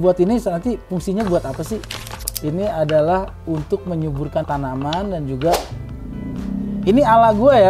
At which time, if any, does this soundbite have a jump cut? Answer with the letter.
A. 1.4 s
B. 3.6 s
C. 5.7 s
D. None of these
C